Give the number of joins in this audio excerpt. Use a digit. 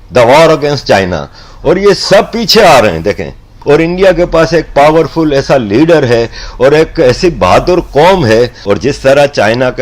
2